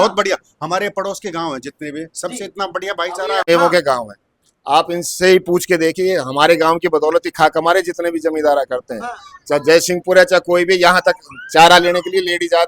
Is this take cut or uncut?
cut